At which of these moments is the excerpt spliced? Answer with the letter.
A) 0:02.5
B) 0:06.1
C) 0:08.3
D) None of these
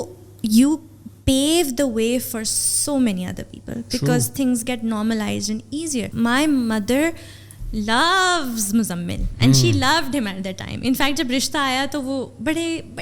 B